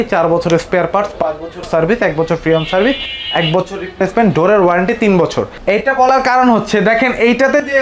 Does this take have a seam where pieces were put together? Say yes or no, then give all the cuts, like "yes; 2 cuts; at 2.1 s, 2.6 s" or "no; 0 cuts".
no; 0 cuts